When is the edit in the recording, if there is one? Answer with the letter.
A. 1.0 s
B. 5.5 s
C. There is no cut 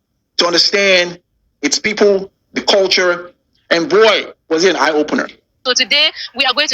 B